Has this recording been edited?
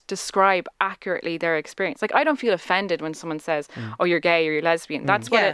no; 0 cuts

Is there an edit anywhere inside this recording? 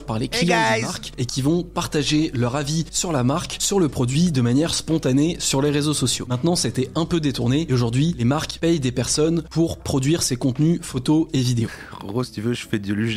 yes; 1 cut; at 11.7 s

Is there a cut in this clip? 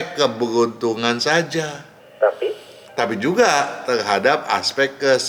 no; 0 cuts

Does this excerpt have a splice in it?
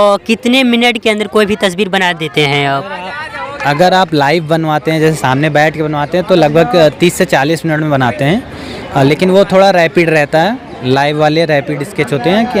no; 0 cuts

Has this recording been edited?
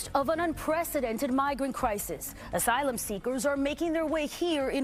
no; 0 cuts

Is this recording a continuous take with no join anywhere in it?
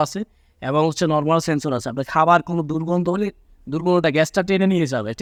yes; 0 cuts

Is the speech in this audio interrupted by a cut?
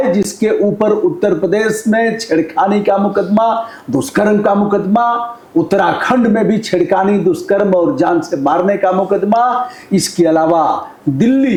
no; 0 cuts

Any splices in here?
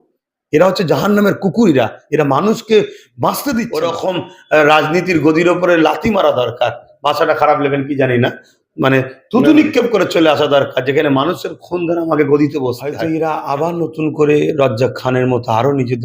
yes; 2 cuts; at 3.8 s, 12.9 s

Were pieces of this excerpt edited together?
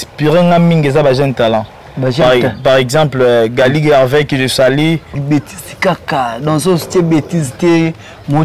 yes; 1 cut; at 5.2 s

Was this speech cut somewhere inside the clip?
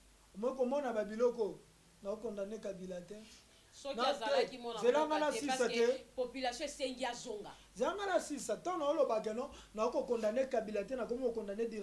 no; 0 cuts

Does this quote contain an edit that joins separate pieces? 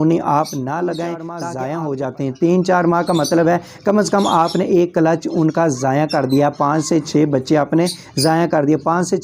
yes; 1 cut; at 1.4 s

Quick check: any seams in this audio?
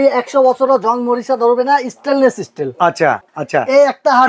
yes; 1 cut; at 3.3 s

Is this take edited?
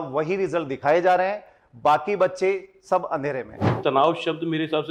yes; 1 cut; at 3.8 s

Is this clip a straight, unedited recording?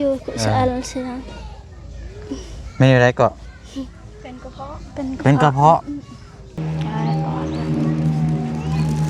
no; 1 cut; at 6.6 s

